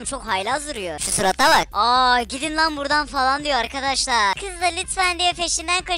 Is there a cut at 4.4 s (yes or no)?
yes